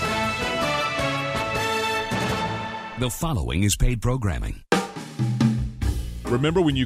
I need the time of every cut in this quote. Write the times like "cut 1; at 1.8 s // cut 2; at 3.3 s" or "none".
cut 1; at 2.9 s // cut 2; at 4.5 s